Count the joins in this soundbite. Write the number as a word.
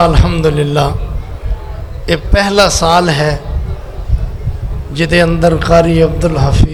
zero